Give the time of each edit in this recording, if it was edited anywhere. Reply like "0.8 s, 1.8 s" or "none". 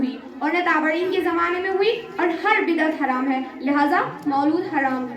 none

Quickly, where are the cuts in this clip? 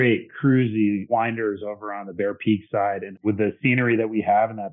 1.1 s, 3.2 s

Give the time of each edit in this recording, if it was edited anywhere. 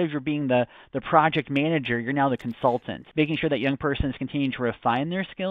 3.0 s

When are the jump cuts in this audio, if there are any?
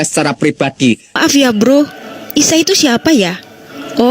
1.1 s

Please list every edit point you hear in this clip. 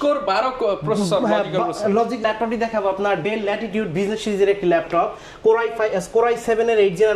2.2 s

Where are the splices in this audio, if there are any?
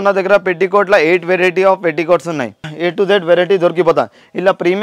none

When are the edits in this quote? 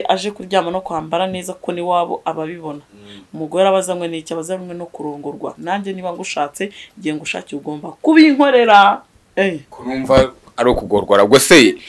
5.6 s, 9.1 s

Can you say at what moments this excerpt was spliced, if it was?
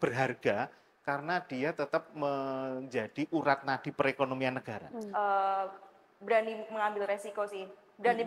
4.9 s

